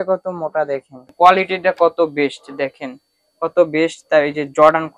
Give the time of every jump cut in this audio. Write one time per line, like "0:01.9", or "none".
0:01.1